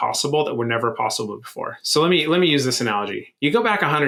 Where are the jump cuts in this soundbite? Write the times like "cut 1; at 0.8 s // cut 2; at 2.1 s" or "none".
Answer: none